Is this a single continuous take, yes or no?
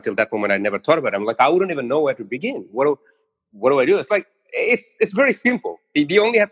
yes